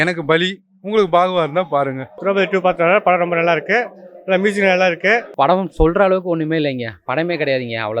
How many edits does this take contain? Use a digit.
2